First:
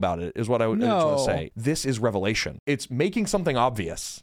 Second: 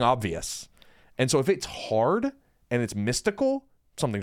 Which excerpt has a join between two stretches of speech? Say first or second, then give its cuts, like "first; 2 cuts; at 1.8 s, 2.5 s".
first; 2 cuts; at 1.5 s, 2.6 s